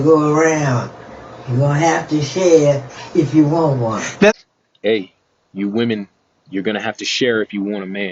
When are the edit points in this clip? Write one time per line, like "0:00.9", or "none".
none